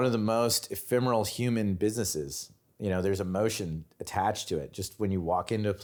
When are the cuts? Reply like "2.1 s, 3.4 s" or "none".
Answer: none